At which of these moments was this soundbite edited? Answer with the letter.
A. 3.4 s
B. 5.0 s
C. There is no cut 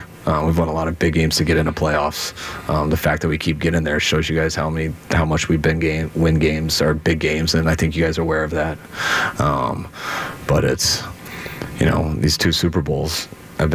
C